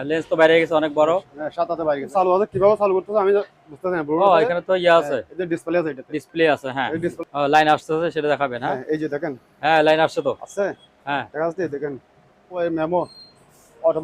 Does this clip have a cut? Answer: yes; 3 cuts; at 2.1 s, 7.2 s, 12.6 s

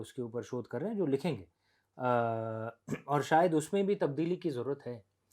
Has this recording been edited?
no; 0 cuts

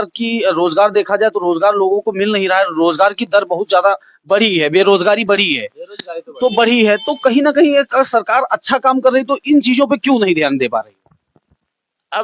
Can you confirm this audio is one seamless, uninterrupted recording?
yes; 0 cuts

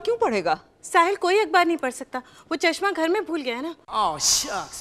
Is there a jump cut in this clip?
no; 0 cuts

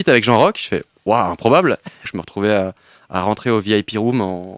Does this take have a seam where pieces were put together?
yes; 1 cut; at 2.1 s

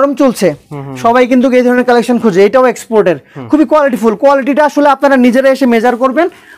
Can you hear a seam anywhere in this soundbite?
no; 0 cuts

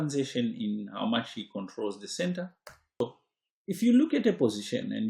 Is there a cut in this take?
yes; 1 cut; at 3.0 s

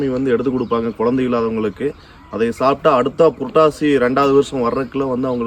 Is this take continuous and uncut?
yes; 0 cuts

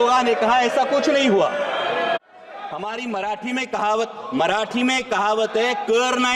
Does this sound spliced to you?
yes; 1 cut; at 2.2 s

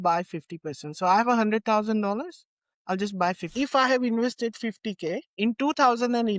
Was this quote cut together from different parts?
yes; 2 cuts; at 3.5 s, 5.3 s

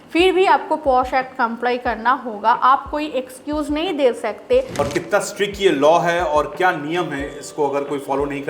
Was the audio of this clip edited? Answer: yes; 1 cut; at 4.7 s

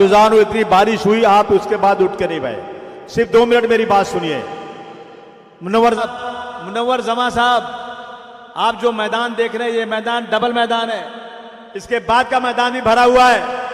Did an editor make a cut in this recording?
yes; 1 cut; at 6.0 s

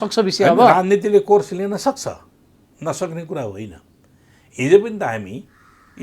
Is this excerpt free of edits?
yes; 0 cuts

